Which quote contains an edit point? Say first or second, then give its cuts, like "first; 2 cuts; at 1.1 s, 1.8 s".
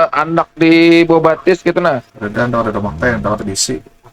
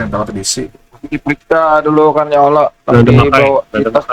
first; 1 cut; at 2.1 s